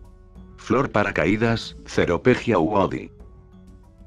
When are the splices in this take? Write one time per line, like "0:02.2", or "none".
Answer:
0:01.0